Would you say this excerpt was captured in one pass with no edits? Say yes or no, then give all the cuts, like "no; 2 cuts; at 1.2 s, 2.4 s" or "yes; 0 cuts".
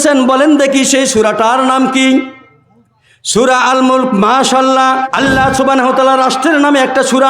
no; 1 cut; at 5.0 s